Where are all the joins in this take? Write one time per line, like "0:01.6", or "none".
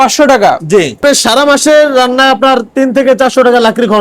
0:01.0